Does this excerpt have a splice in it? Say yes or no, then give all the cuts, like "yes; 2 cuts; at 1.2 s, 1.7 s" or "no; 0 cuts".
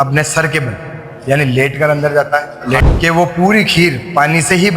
yes; 1 cut; at 2.8 s